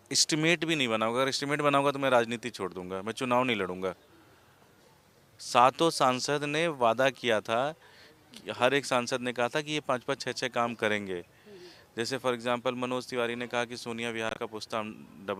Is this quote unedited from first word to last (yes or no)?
yes